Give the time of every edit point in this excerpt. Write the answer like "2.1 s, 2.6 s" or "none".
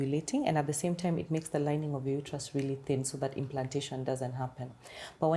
none